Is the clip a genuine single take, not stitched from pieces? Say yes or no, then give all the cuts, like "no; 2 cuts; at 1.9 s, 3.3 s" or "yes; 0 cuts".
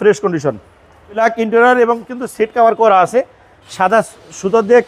no; 1 cut; at 1.2 s